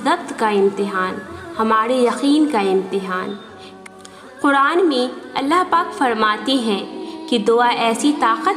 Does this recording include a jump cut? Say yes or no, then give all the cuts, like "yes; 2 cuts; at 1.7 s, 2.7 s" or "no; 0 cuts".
yes; 1 cut; at 3.8 s